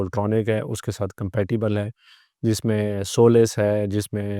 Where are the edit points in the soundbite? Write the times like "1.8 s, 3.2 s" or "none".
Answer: none